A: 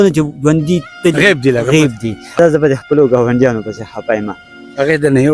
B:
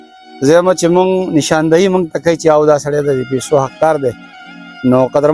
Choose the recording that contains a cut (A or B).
A